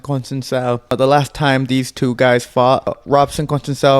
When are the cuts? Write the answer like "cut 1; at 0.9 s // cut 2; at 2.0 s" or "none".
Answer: cut 1; at 0.9 s // cut 2; at 3.0 s